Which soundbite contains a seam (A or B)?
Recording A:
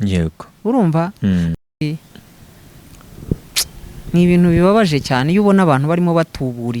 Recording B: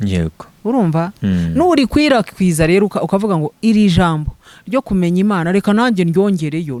A